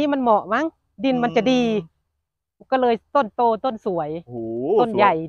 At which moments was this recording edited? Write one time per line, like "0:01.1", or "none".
none